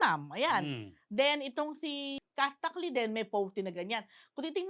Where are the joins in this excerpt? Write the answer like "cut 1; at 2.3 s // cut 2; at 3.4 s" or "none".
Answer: cut 1; at 2.2 s